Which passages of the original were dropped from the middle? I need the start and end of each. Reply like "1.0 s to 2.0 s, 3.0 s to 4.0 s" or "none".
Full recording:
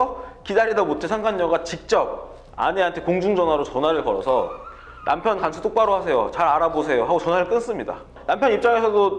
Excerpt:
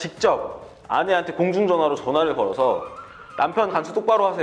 none